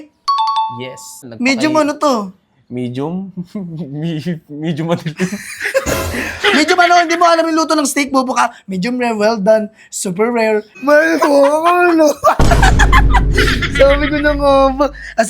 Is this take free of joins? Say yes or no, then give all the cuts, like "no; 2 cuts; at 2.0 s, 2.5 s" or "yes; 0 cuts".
no; 2 cuts; at 1.2 s, 10.7 s